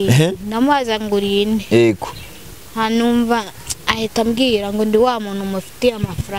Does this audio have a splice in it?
no; 0 cuts

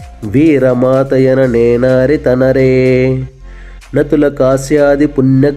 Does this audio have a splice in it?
no; 0 cuts

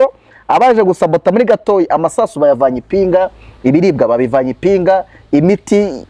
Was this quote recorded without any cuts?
yes; 0 cuts

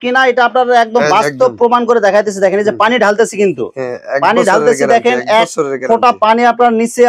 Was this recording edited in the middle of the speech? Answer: no; 0 cuts

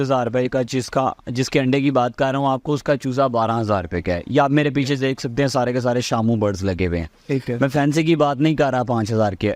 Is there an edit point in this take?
no; 0 cuts

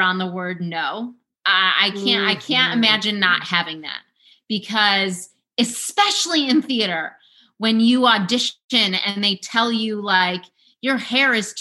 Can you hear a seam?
yes; 1 cut; at 1.4 s

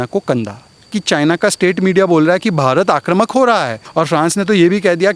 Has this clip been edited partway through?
yes; 2 cuts; at 0.9 s, 3.8 s

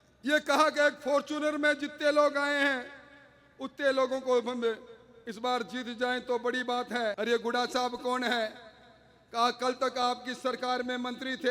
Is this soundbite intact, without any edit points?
no; 1 cut; at 7.2 s

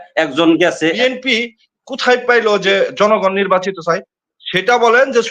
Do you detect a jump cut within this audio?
yes; 1 cut; at 1.0 s

